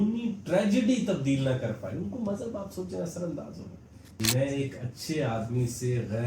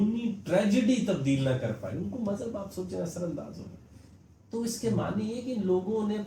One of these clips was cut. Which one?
first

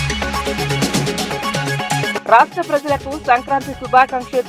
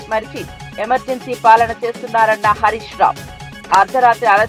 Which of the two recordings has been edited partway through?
first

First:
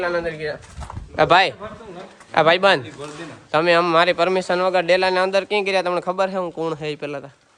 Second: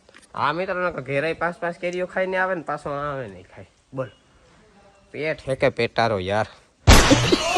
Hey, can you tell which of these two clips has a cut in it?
second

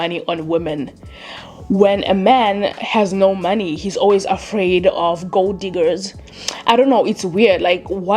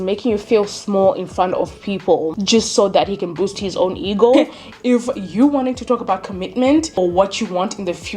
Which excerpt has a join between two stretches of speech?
second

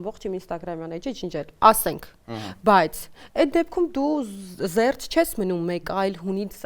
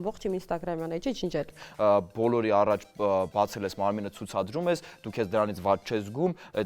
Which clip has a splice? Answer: second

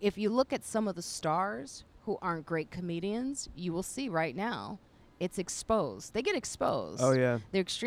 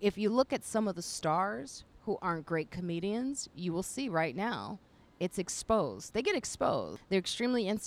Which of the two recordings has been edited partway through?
second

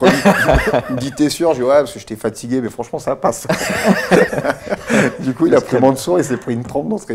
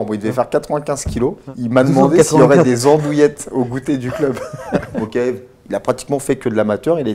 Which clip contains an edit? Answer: second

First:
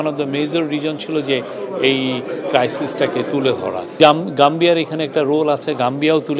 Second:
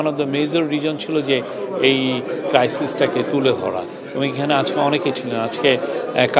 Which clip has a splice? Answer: first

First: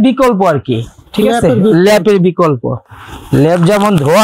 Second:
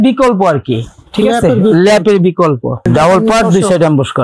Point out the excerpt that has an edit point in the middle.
second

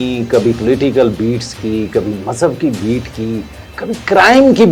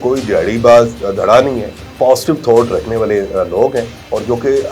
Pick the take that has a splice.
second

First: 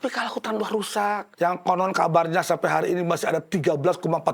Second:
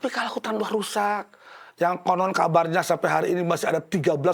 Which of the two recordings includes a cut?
first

